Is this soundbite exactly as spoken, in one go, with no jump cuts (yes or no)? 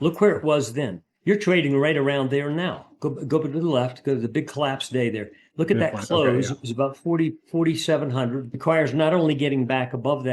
no